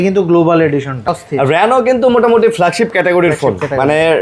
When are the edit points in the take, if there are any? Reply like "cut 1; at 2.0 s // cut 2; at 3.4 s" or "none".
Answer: cut 1; at 1.2 s

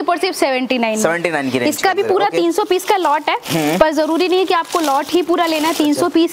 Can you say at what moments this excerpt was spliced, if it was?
none

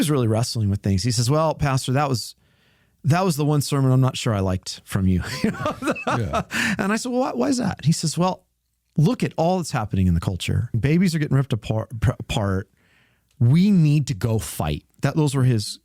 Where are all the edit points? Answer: cut 1; at 10.8 s

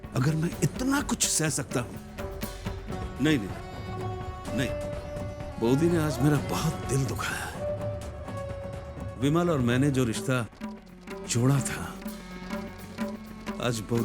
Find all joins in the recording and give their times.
cut 1; at 2.9 s

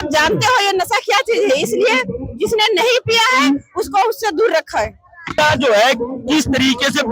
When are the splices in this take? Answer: none

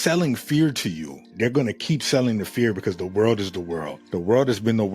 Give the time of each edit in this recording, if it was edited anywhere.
cut 1; at 1.3 s

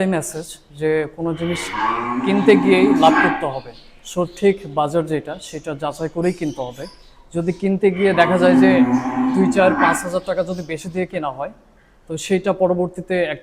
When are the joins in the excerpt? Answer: none

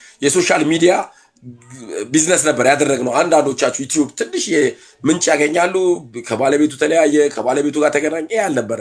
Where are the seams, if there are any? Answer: none

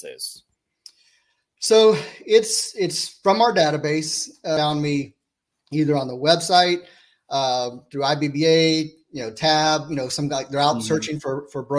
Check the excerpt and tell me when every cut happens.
cut 1; at 4.6 s

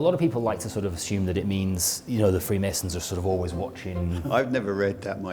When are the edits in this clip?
cut 1; at 4.2 s

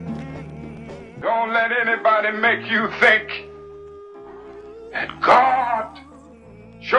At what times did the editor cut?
cut 1; at 1.2 s

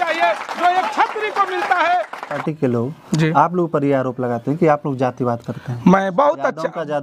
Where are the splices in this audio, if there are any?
cut 1; at 2.3 s

